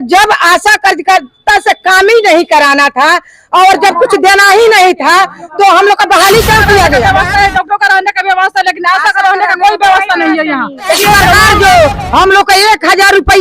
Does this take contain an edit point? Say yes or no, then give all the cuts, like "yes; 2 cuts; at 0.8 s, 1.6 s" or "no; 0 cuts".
yes; 2 cuts; at 7.0 s, 11.5 s